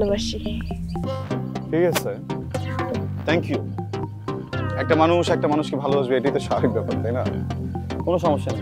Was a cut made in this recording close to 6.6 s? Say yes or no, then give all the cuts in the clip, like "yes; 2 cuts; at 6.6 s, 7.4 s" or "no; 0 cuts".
no; 1 cut; at 1.1 s